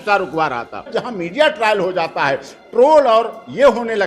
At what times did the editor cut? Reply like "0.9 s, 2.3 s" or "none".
0.9 s